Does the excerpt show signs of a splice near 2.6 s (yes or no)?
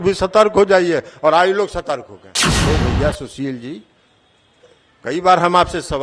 yes